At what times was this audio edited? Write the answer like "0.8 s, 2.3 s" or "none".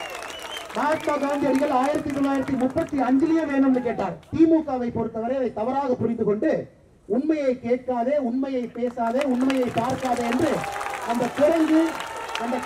4.3 s